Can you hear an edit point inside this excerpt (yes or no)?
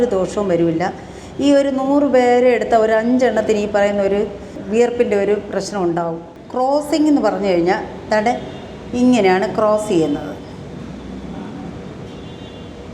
yes